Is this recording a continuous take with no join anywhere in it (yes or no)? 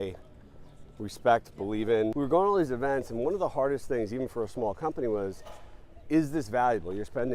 no